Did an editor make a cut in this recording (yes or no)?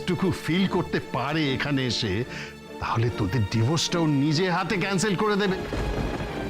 yes